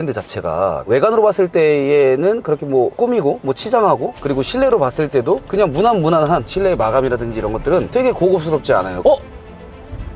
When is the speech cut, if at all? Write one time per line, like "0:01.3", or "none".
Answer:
0:00.8
0:04.1
0:08.9